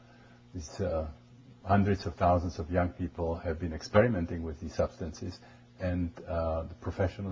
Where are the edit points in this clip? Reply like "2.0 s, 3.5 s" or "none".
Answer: none